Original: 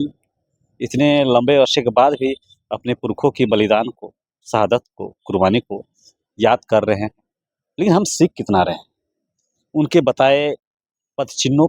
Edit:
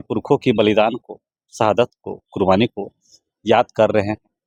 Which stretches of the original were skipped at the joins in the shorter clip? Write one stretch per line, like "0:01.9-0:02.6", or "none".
none